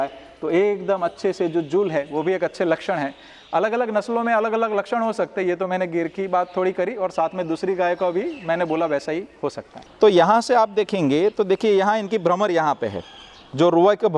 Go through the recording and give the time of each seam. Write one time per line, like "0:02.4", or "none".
none